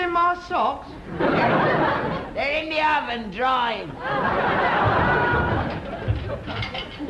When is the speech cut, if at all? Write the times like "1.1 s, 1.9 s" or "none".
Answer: none